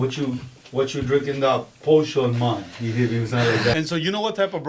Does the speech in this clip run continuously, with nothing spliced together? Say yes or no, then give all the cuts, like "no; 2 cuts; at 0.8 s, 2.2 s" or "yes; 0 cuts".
no; 1 cut; at 3.8 s